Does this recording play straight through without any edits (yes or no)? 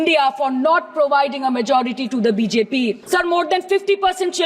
no